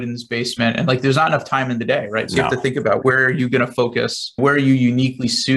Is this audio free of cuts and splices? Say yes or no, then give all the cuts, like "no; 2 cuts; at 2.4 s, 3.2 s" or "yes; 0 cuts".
no; 2 cuts; at 3.0 s, 4.4 s